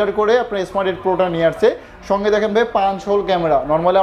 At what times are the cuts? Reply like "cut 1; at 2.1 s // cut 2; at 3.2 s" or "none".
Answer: none